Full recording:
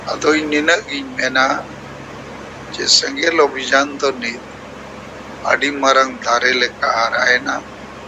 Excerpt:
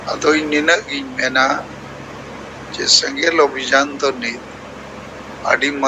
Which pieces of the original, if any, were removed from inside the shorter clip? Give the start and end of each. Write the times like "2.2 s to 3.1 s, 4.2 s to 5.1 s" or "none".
none